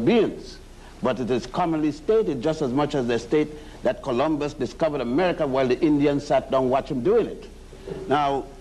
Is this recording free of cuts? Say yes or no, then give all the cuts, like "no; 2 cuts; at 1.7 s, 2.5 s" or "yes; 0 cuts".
no; 1 cut; at 7.3 s